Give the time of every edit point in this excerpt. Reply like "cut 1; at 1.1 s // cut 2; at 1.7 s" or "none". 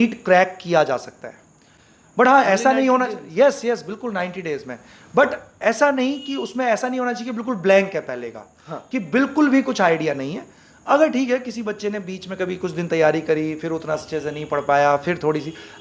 none